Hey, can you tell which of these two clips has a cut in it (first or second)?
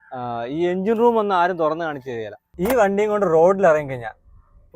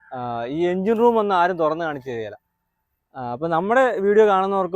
first